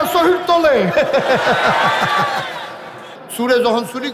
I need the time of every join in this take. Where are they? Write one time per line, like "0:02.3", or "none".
0:03.1